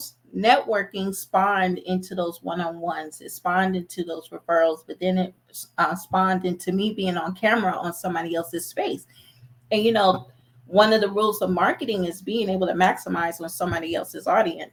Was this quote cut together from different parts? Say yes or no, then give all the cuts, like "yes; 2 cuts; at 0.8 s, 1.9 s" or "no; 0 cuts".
no; 0 cuts